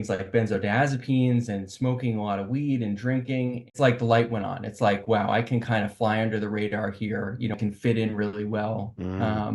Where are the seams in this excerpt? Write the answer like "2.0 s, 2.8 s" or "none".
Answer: 3.7 s, 7.6 s